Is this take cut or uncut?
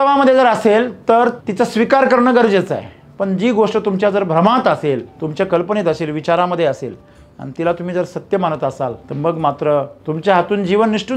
cut